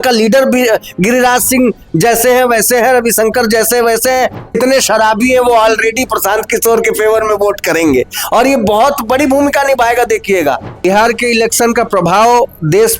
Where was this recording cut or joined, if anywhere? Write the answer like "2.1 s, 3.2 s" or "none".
4.5 s, 10.8 s